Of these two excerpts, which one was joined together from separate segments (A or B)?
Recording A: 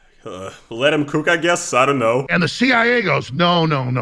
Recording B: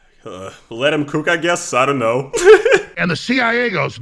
A